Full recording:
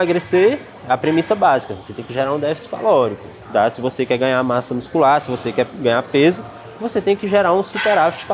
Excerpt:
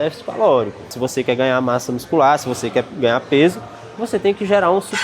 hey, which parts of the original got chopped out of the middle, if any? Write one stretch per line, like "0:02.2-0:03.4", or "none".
0:03.4-0:03.8